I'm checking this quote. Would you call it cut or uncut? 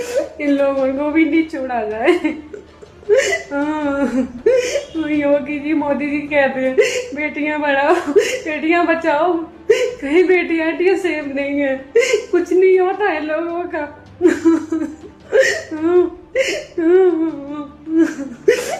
uncut